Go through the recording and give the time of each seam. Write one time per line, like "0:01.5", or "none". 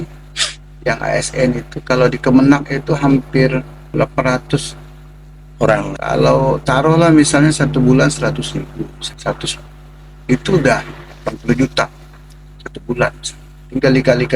0:03.9
0:05.9
0:09.0